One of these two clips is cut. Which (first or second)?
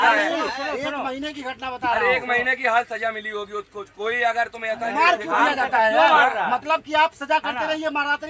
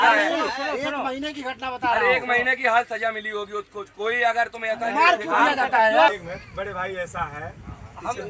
second